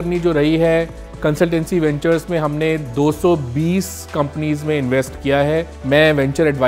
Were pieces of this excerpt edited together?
yes; 1 cut; at 5.7 s

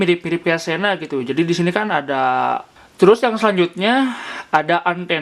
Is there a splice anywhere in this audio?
yes; 1 cut; at 2.7 s

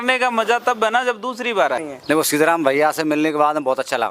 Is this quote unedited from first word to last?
no; 1 cut; at 1.9 s

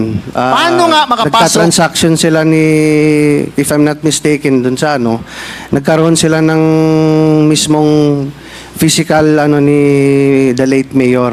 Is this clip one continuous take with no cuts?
yes; 0 cuts

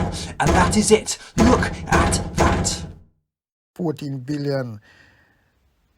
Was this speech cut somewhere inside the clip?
yes; 1 cut; at 3.7 s

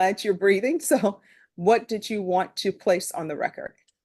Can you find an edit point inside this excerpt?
no; 0 cuts

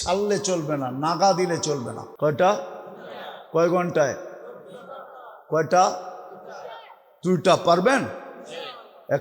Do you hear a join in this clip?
yes; 1 cut; at 2.0 s

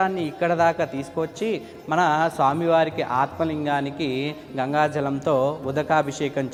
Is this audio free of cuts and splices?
yes; 0 cuts

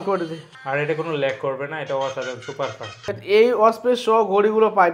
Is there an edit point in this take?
yes; 1 cut; at 3.0 s

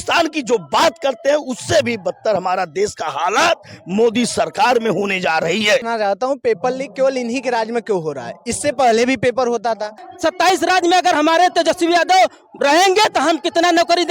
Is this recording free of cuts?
no; 2 cuts; at 5.9 s, 10.1 s

